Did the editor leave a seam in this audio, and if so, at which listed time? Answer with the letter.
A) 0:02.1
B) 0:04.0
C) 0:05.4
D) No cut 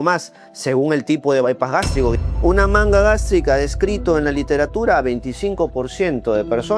A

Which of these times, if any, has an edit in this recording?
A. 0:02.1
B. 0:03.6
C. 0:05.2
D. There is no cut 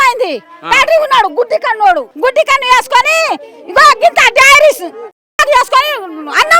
A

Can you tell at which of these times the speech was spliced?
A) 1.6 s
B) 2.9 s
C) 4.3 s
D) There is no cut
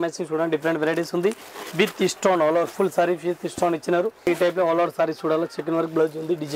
C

